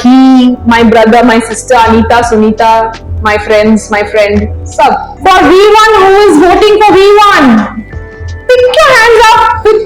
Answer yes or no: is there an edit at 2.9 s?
no